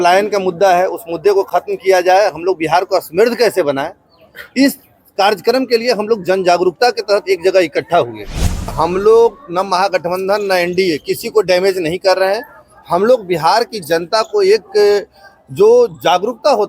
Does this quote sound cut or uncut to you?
cut